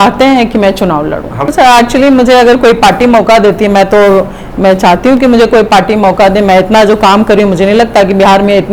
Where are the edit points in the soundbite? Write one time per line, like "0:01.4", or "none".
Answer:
0:01.3